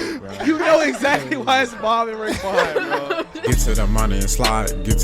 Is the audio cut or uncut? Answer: cut